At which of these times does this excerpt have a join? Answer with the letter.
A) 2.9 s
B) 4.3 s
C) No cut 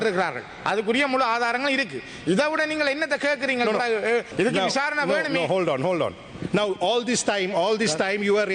B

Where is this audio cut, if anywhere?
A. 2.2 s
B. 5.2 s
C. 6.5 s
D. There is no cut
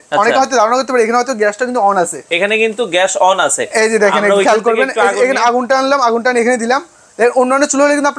A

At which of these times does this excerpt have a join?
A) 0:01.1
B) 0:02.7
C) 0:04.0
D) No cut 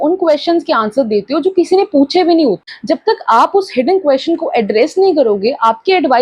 B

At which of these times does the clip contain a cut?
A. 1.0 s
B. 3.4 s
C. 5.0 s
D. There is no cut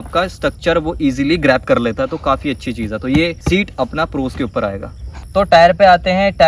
D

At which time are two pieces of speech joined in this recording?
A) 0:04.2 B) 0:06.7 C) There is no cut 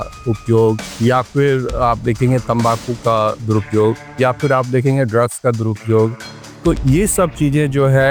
C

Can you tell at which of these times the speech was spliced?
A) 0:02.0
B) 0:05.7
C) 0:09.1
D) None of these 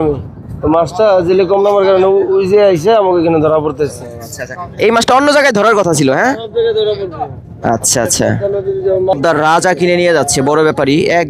C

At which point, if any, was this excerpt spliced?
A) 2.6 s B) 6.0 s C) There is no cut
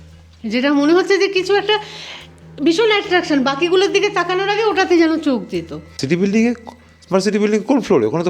B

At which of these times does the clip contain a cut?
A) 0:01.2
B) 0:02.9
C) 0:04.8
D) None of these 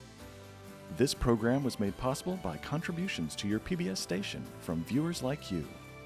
D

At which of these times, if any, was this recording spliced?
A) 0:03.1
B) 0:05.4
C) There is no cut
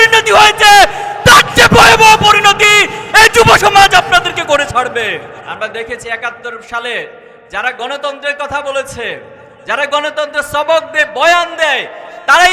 B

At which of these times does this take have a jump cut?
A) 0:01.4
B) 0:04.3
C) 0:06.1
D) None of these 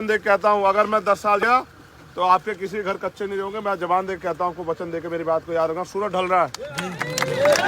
A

